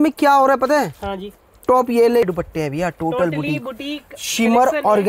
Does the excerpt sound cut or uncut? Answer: cut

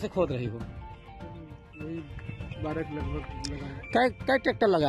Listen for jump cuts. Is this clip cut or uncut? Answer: uncut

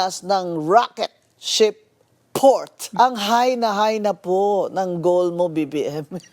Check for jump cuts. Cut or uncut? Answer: cut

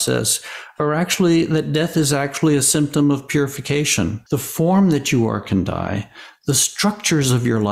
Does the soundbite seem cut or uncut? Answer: cut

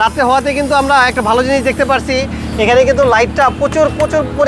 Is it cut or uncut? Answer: uncut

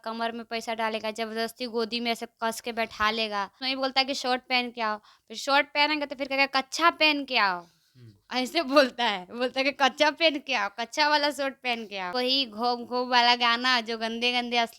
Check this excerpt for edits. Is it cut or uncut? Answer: cut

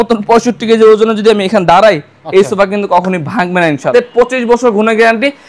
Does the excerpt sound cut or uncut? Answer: cut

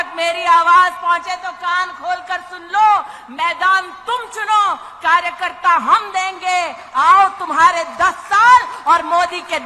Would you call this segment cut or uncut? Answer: uncut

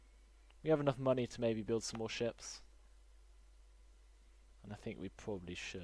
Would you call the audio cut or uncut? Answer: cut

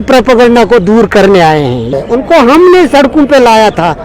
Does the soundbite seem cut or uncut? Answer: cut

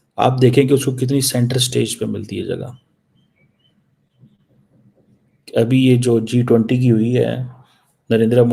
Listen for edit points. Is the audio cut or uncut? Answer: uncut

